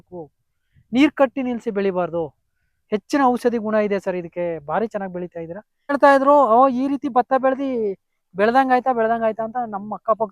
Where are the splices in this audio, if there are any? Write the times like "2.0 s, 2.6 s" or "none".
5.9 s

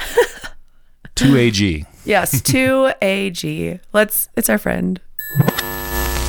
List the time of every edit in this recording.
5.2 s

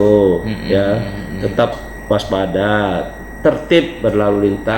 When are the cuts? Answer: 1.7 s

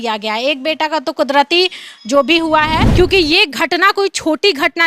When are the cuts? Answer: 2.9 s

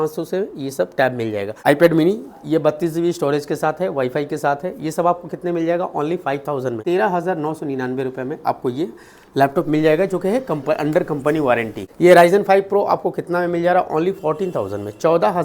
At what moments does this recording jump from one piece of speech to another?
1.5 s, 6.8 s, 11.9 s

